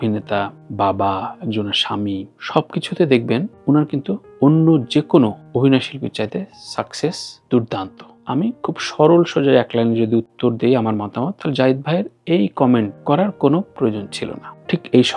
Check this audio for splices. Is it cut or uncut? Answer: cut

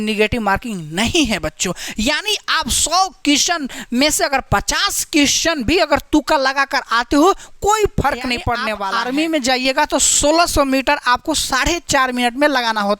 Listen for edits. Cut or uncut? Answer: cut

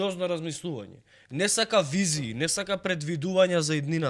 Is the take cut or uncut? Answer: uncut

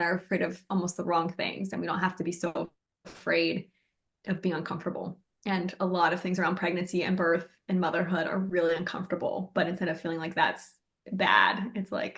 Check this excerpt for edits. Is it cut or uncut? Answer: uncut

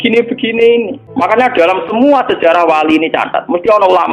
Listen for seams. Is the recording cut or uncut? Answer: cut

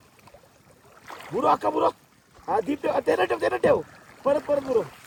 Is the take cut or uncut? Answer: uncut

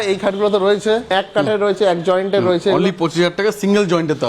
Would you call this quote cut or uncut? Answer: cut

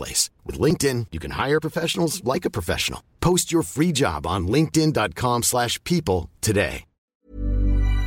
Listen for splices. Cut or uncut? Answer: cut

